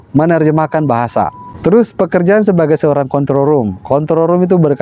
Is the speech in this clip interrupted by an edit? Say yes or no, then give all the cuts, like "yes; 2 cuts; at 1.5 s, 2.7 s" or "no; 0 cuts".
yes; 1 cut; at 1.4 s